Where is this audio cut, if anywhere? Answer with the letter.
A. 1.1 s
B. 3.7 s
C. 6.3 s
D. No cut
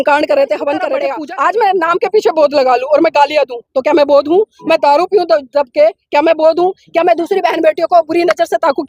A